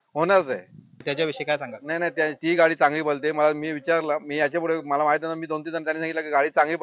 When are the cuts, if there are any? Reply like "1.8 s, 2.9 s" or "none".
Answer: 1.0 s